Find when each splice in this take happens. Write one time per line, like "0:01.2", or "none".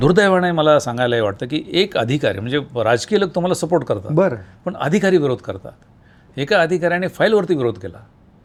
none